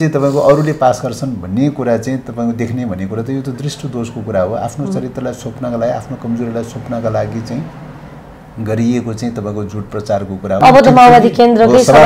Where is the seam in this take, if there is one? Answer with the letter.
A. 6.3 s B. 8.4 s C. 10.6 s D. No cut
C